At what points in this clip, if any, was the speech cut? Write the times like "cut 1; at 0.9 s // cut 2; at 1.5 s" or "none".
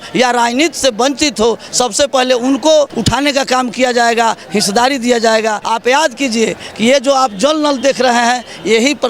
cut 1; at 3.0 s // cut 2; at 5.6 s